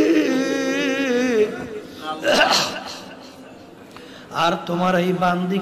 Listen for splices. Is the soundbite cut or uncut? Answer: uncut